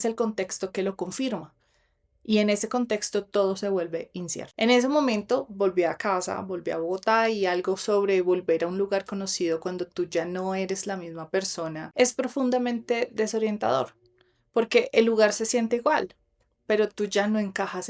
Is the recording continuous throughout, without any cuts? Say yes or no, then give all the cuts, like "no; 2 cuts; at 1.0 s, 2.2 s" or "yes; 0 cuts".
yes; 0 cuts